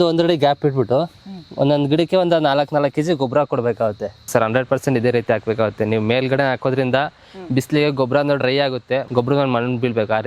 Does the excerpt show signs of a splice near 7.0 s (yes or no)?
no